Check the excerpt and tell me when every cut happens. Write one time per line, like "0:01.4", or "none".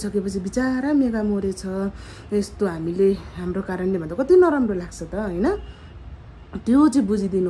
none